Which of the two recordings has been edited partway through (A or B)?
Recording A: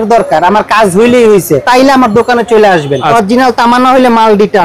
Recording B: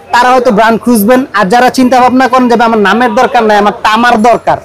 A